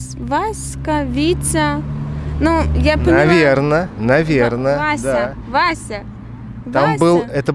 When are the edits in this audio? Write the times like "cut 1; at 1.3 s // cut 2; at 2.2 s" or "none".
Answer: none